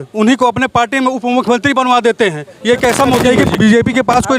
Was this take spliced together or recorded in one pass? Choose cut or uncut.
cut